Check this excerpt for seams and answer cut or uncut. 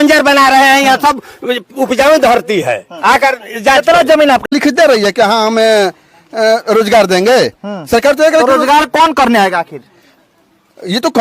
cut